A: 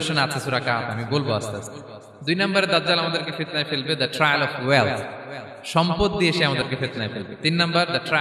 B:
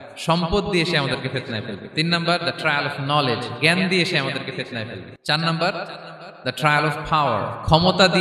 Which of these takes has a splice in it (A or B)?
B